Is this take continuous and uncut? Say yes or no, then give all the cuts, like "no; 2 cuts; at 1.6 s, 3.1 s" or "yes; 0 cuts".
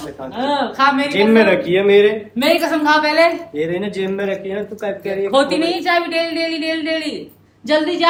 yes; 0 cuts